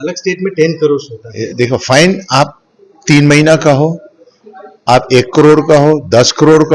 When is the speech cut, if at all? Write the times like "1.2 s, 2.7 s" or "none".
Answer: 1.4 s